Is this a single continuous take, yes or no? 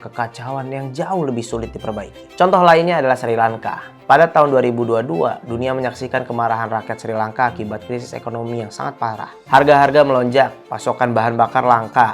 yes